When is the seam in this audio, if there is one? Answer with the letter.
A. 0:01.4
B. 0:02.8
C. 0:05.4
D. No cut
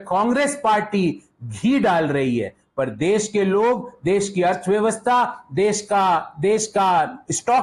D